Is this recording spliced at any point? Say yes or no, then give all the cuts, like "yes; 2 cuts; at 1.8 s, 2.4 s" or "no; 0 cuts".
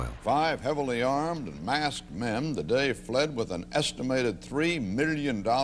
yes; 1 cut; at 1.2 s